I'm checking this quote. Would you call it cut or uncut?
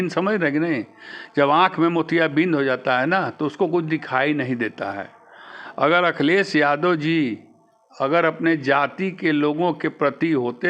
uncut